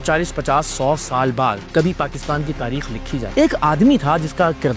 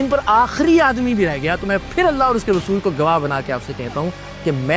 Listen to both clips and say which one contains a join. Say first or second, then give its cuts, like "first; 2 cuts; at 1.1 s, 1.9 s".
first; 2 cuts; at 1.6 s, 3.2 s